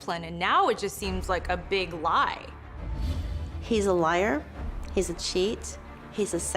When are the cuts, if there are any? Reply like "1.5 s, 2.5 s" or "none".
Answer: 3.0 s